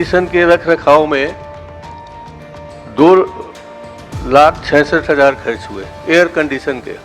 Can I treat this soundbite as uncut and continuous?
yes; 0 cuts

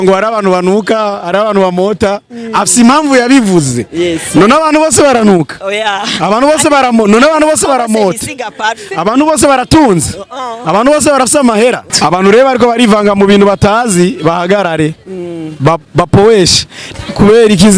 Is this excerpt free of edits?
no; 2 cuts; at 11.9 s, 16.9 s

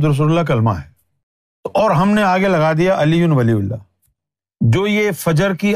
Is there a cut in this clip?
yes; 2 cuts; at 1.8 s, 4.8 s

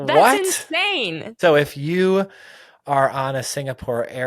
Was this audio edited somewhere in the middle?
yes; 1 cut; at 1.4 s

